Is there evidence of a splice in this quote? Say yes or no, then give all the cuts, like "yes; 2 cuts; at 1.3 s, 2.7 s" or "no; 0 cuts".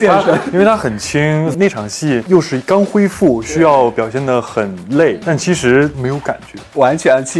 no; 0 cuts